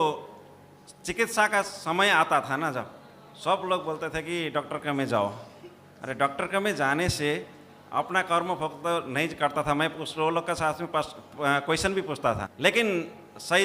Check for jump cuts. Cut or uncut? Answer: cut